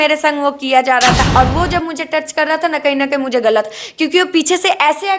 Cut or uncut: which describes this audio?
cut